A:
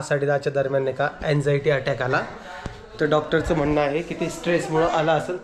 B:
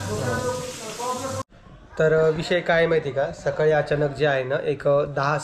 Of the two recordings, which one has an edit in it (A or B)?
B